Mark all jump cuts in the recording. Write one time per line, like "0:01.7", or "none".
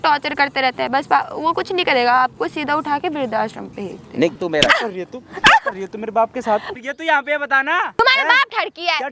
0:04.4
0:06.7
0:08.0